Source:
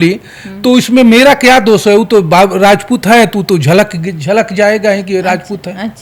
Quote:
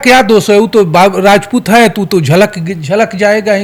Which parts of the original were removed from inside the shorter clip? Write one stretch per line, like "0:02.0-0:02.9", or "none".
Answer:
none

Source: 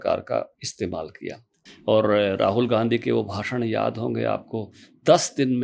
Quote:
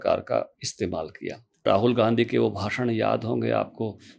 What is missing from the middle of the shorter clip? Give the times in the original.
0:01.6-0:02.4

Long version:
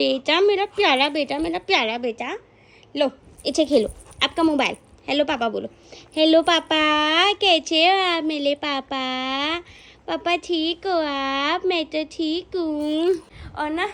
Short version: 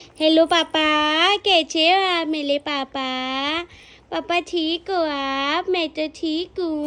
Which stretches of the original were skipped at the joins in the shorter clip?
none

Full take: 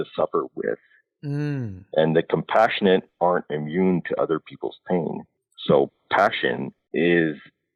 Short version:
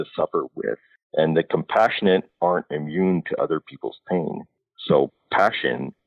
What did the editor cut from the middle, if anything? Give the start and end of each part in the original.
0:01.0-0:01.7

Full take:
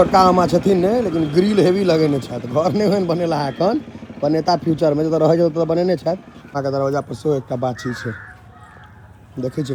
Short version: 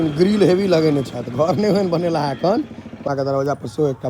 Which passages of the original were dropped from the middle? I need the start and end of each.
0:04.0-0:06.3

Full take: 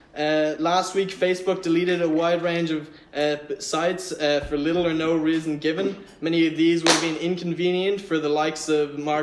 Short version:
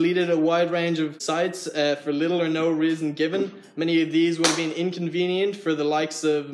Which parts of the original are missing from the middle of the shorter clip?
0:02.9-0:03.6

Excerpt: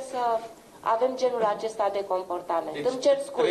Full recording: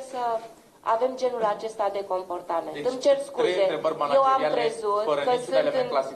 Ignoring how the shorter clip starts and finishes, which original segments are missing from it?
none

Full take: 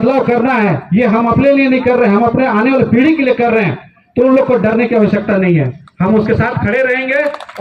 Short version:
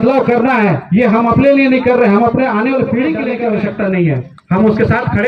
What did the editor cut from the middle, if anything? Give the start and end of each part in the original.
0:03.3-0:04.8

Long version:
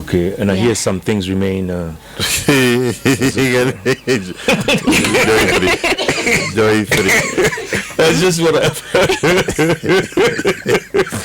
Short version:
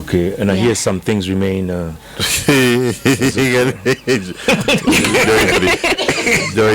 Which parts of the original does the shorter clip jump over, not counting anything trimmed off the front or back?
none

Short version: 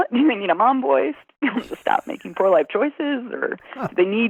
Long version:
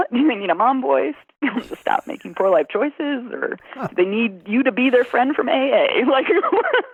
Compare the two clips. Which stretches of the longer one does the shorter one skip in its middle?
none

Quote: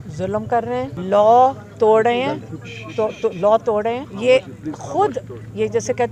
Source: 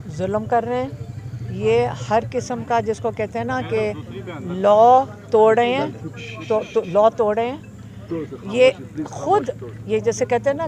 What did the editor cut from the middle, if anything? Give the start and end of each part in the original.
0:00.9-0:04.5
0:07.6-0:08.4

